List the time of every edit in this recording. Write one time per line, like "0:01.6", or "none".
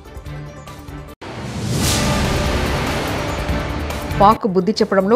0:01.3
0:04.1